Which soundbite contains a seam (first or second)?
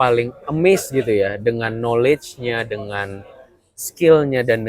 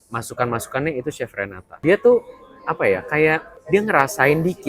second